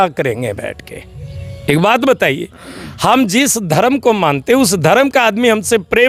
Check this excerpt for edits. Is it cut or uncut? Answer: uncut